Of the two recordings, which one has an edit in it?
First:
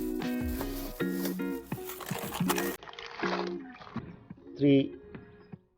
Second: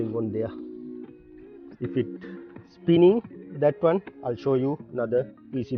first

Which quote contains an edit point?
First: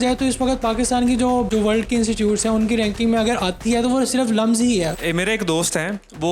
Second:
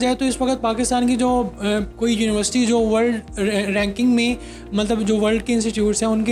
first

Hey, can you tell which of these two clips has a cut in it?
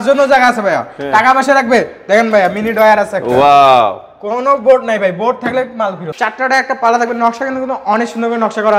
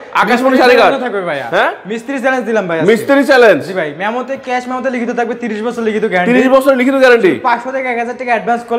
first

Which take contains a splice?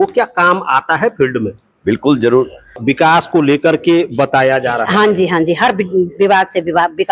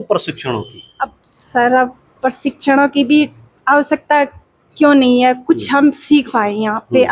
first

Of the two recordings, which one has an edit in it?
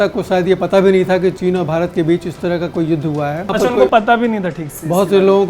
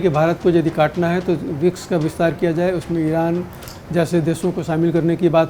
first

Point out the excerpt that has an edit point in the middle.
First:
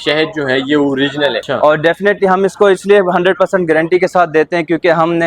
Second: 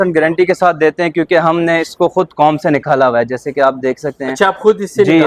first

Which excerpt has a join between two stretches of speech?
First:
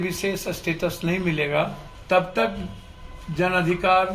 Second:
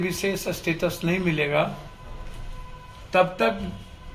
first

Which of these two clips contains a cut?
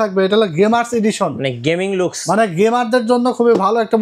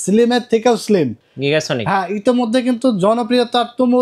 second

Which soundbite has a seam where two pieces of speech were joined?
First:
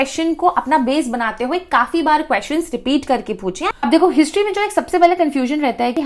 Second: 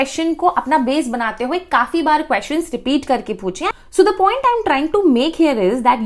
first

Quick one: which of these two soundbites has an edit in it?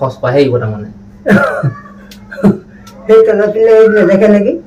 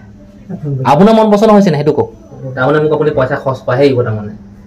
second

